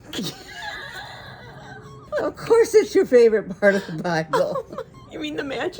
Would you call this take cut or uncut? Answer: cut